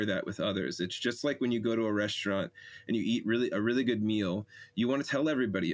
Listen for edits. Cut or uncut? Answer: uncut